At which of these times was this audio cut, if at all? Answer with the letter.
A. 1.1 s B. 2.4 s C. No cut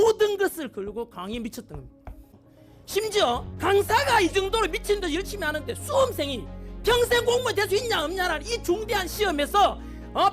B